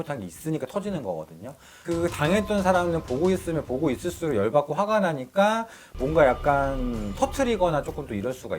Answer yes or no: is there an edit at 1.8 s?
yes